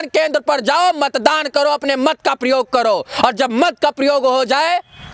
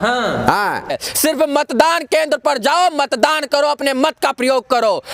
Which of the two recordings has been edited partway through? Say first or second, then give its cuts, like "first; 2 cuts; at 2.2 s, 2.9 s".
second; 1 cut; at 1.0 s